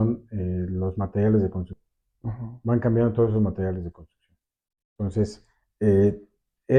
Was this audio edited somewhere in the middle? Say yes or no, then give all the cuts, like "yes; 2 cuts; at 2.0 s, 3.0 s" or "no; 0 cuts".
no; 0 cuts